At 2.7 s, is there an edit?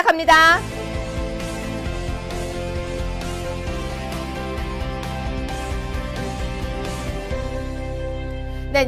no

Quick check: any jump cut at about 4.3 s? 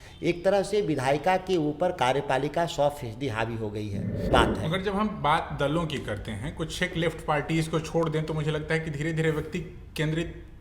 yes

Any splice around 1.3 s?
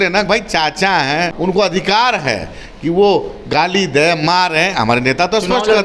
yes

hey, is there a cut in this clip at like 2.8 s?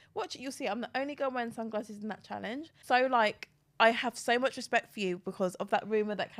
yes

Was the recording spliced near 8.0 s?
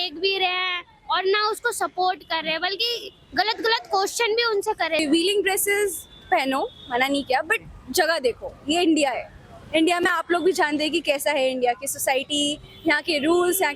no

